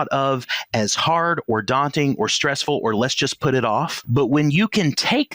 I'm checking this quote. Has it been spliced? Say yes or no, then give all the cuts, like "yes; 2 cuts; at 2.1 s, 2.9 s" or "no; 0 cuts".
yes; 1 cut; at 4.0 s